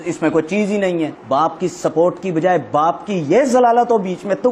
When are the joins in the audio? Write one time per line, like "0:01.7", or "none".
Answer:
0:01.2